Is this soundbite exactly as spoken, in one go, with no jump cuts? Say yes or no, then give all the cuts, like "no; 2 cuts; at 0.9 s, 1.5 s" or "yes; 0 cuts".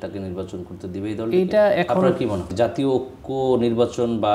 no; 1 cut; at 2.5 s